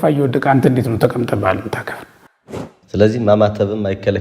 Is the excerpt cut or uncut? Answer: cut